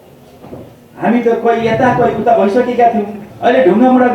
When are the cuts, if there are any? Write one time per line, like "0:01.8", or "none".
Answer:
0:03.2